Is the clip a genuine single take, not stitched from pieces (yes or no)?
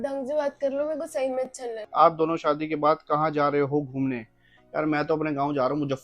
no